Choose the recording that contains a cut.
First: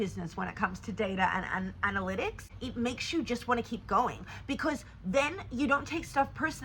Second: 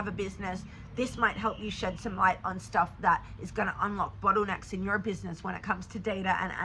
first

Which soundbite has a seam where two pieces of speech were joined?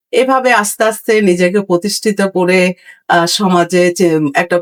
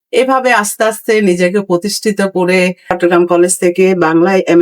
second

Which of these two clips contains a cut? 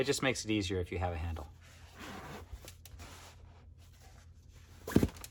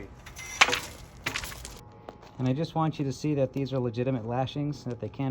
second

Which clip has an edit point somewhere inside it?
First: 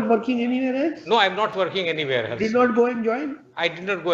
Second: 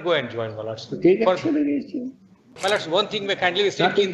second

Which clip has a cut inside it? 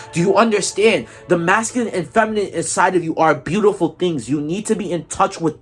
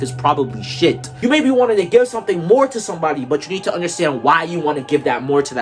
second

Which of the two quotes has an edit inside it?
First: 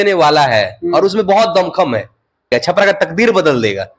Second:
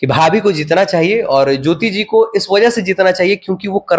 first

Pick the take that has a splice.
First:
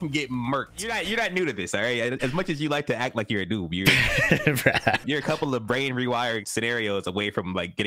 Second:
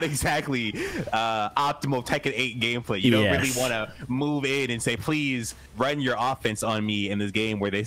first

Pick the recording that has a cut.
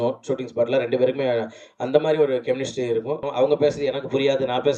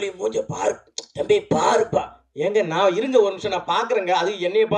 first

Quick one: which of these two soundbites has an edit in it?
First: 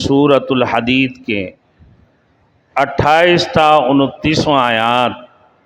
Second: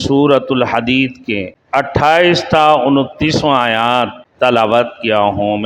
second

